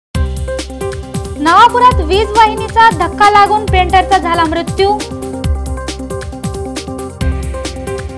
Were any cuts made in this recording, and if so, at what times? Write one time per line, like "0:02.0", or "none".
0:01.0